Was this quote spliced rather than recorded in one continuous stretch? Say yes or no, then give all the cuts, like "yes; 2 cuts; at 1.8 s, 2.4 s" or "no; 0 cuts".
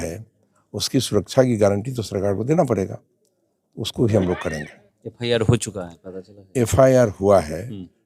no; 0 cuts